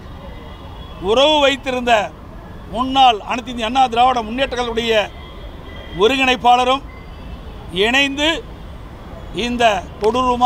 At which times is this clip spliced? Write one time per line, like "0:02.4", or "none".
none